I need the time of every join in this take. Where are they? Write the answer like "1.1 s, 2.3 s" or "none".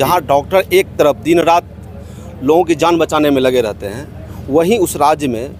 none